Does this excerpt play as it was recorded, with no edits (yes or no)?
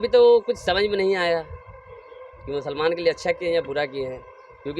yes